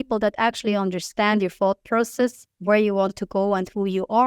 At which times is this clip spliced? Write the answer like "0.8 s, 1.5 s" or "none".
2.5 s